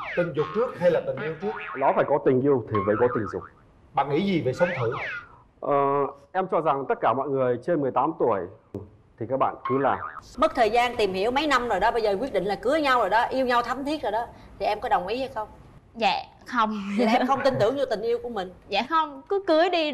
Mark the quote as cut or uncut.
cut